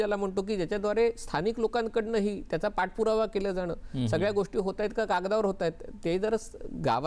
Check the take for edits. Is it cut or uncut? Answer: uncut